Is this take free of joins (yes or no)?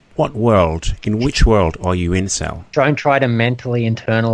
no